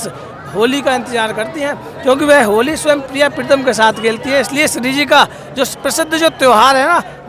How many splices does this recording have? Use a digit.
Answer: 0